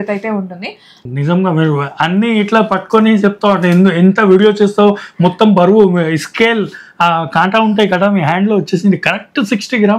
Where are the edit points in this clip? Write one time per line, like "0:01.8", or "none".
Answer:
0:01.0